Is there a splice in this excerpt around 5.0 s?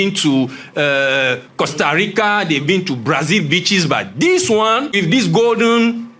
yes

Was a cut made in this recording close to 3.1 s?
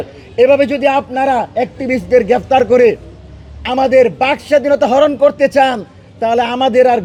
no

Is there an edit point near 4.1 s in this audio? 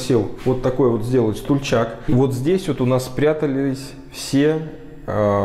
no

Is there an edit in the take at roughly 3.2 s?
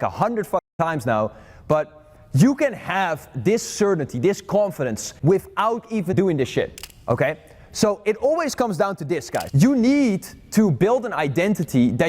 no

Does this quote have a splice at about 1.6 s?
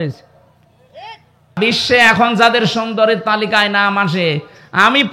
yes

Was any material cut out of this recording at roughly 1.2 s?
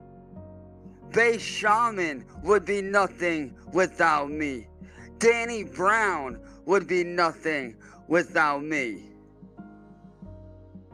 yes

